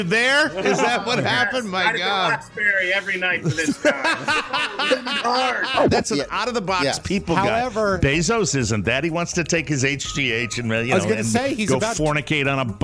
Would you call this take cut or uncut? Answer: cut